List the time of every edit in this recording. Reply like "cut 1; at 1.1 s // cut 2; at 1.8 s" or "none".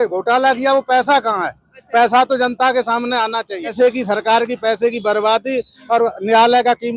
cut 1; at 3.7 s